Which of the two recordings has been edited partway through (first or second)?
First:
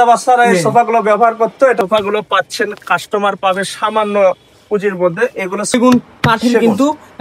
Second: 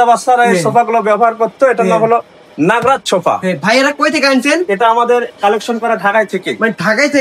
first